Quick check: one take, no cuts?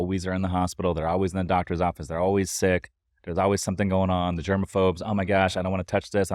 yes; 0 cuts

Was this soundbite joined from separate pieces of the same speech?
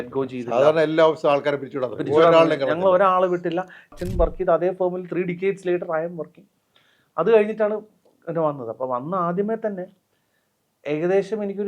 yes; 1 cut; at 4.0 s

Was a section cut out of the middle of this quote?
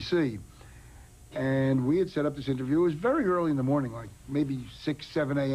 no; 0 cuts

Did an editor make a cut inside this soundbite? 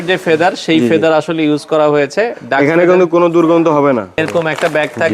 yes; 1 cut; at 4.2 s

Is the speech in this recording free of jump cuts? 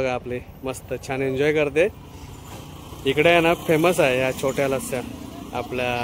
yes; 0 cuts

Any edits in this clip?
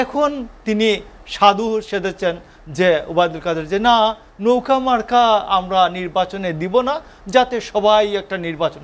no; 0 cuts

